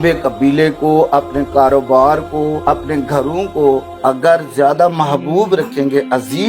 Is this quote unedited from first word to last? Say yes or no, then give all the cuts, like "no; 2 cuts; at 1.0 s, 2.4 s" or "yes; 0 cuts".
no; 2 cuts; at 2.6 s, 3.9 s